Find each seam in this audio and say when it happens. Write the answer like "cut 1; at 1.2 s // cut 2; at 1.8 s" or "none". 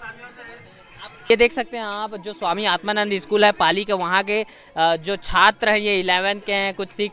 cut 1; at 1.3 s